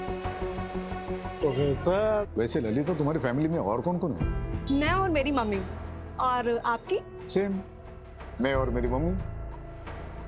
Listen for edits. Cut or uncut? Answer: cut